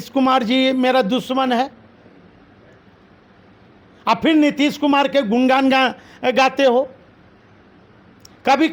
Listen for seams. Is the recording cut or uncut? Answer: uncut